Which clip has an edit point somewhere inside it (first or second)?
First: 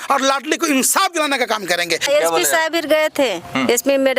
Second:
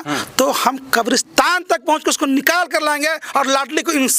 first